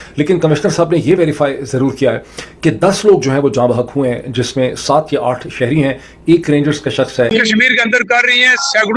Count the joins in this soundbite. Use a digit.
1